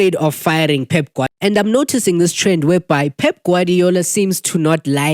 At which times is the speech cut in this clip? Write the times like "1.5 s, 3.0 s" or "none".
1.3 s